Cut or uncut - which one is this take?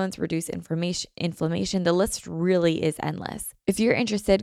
cut